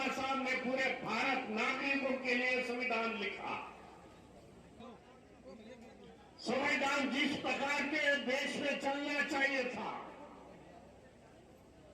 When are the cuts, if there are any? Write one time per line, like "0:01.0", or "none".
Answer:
0:04.8